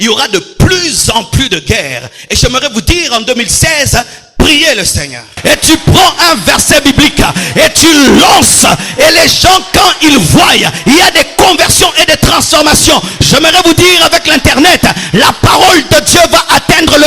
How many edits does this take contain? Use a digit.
1